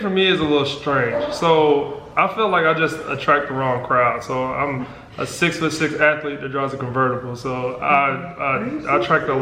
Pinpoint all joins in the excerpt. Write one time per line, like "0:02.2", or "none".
none

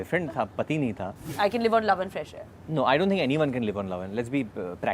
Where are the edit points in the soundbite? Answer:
0:01.3

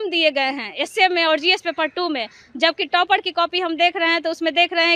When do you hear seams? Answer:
none

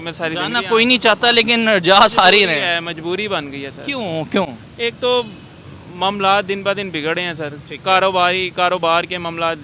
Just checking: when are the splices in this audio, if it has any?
none

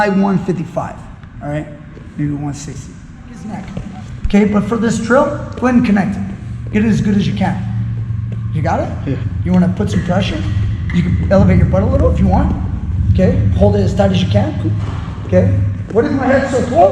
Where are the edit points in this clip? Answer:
0:03.7

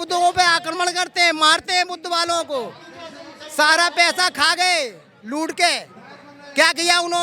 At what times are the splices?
none

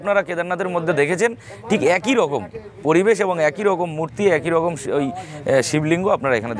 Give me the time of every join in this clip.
none

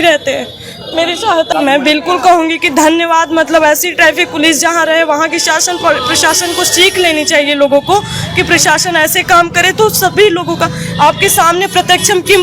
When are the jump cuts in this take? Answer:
0:01.5

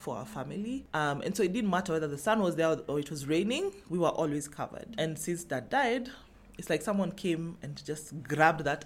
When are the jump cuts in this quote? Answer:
none

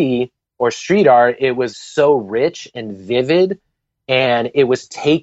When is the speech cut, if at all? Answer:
0:01.7

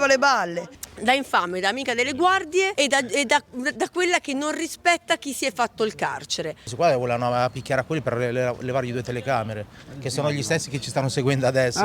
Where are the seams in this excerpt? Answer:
0:00.9
0:02.7
0:06.7

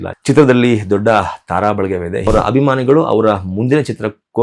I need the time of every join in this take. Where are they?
0:02.3

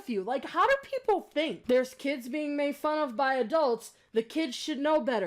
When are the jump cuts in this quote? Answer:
0:01.6

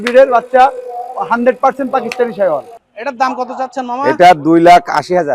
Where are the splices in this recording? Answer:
0:02.7

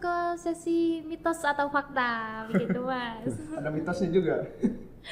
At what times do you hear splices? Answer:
0:02.4

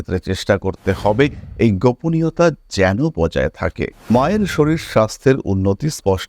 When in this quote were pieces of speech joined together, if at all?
0:03.9

